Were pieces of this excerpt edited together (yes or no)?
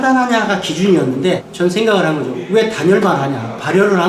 yes